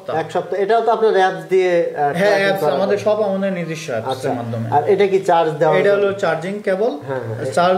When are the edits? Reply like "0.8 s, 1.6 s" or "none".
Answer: none